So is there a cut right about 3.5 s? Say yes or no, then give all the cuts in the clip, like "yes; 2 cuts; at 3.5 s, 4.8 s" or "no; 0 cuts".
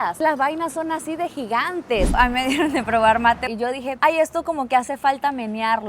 yes; 2 cuts; at 2.1 s, 3.5 s